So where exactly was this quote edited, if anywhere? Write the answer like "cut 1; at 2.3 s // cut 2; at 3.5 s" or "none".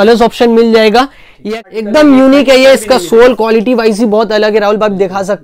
cut 1; at 1.4 s